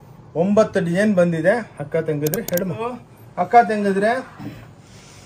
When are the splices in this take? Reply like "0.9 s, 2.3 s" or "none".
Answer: 3.2 s